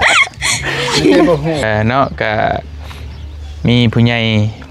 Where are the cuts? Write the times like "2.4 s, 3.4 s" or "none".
1.6 s